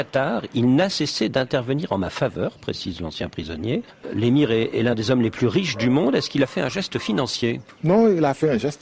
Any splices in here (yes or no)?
no